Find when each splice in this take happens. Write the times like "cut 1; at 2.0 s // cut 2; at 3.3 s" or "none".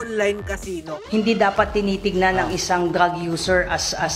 cut 1; at 1.0 s